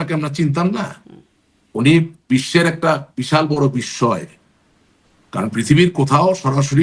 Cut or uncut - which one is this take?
uncut